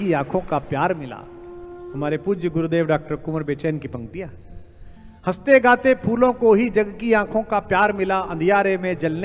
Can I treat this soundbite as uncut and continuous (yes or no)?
yes